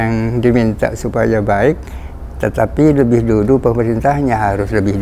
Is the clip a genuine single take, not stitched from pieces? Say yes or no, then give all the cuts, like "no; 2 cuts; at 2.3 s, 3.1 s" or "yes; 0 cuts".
yes; 0 cuts